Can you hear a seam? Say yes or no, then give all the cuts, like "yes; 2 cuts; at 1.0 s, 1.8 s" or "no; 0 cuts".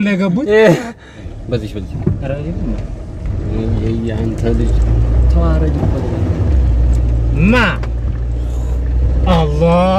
yes; 1 cut; at 1.3 s